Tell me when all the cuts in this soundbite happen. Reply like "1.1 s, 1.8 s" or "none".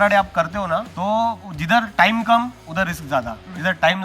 0.9 s, 1.5 s, 3.0 s